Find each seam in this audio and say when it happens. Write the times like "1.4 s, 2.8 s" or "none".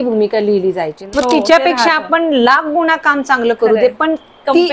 1.0 s